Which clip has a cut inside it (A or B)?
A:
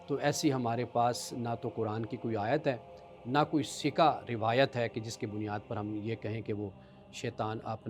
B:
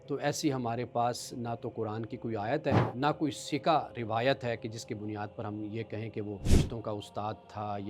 B